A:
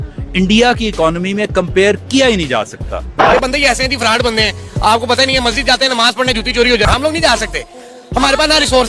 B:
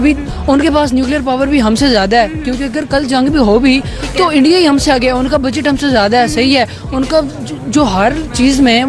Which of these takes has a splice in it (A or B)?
A